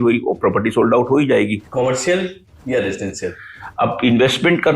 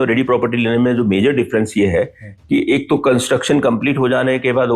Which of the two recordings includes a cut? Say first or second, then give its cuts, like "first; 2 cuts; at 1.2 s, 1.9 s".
first; 2 cuts; at 1.6 s, 2.5 s